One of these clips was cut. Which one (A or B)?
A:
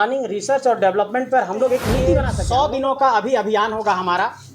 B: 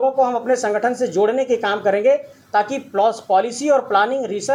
A